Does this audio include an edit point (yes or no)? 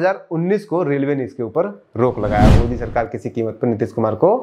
yes